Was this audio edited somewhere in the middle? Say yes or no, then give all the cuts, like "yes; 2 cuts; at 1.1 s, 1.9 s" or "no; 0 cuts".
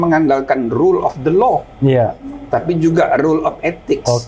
no; 0 cuts